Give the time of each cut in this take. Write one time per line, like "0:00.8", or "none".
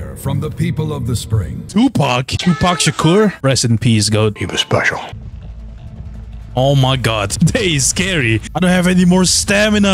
0:05.2
0:08.5

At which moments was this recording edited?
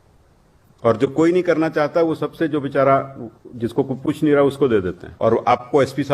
0:05.0

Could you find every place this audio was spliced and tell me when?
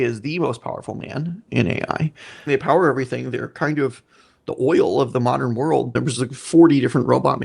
0:01.4
0:02.5
0:05.9

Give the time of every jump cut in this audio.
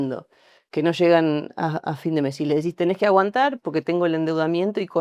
none

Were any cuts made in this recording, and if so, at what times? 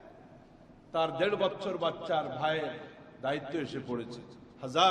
none

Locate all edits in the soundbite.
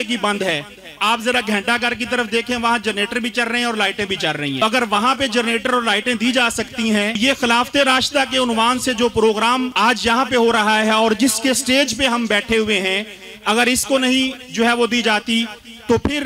0:04.6
0:07.2
0:09.7

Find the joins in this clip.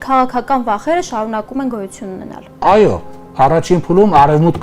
0:02.6

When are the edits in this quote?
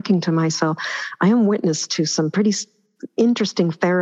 none

